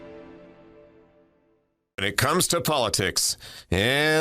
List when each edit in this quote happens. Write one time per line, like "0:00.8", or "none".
0:02.1